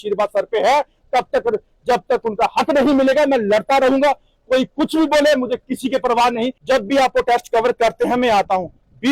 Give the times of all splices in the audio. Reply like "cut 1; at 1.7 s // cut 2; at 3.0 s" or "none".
cut 1; at 6.6 s